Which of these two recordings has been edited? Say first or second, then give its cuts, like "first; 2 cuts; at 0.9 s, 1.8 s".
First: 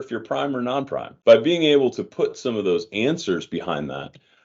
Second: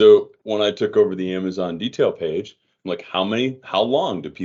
first; 1 cut; at 1.1 s